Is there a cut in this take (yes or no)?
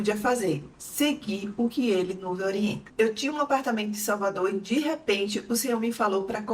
no